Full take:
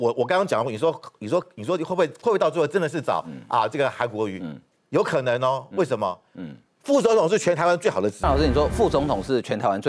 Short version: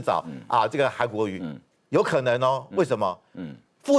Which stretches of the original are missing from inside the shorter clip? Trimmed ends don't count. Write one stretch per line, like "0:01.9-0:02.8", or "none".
none